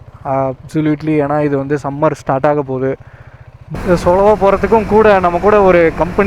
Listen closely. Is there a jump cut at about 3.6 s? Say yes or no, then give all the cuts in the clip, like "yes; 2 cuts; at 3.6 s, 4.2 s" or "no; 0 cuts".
yes; 1 cut; at 3.6 s